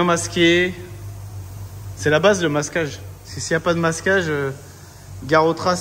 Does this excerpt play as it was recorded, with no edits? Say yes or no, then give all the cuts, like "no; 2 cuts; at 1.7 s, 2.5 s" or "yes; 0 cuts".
yes; 0 cuts